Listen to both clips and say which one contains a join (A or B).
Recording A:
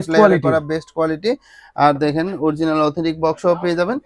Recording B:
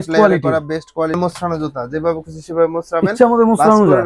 B